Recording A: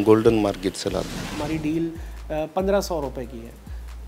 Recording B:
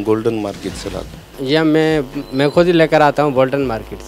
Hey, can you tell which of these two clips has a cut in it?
A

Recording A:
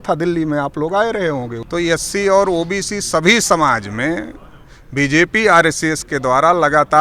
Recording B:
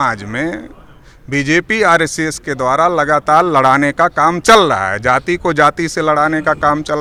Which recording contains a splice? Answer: A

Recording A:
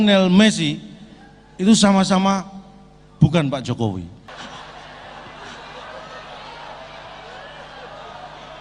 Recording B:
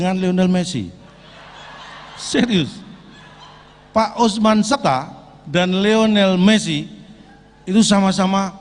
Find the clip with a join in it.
A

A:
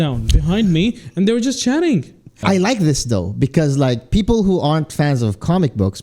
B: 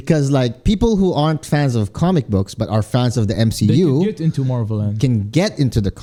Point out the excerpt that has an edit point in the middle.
A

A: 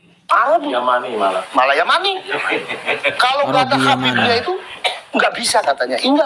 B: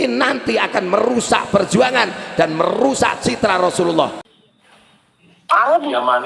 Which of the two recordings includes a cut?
B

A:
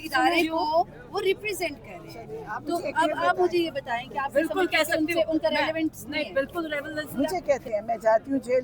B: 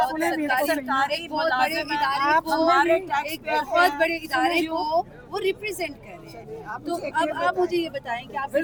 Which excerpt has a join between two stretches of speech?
A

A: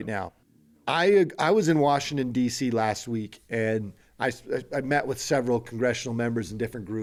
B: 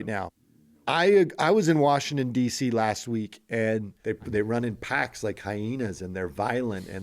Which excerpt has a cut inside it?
B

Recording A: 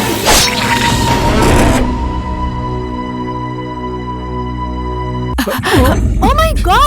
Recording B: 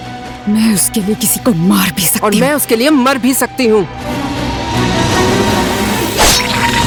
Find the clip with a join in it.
A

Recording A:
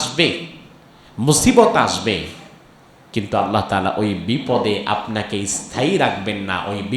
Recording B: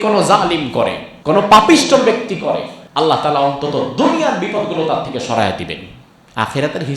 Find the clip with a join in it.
B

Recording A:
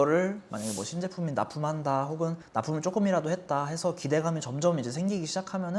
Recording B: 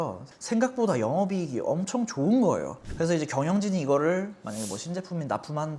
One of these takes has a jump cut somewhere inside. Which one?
B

